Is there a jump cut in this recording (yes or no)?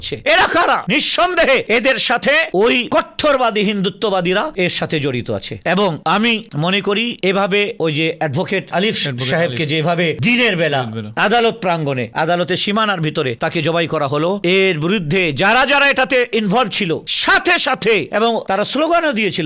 no